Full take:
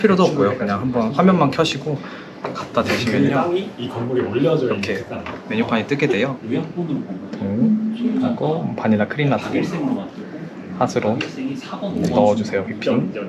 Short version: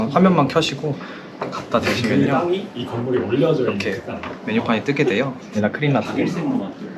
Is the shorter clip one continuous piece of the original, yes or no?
no